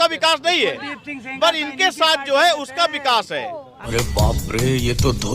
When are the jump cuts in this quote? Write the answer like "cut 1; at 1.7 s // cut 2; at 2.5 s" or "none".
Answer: cut 1; at 3.9 s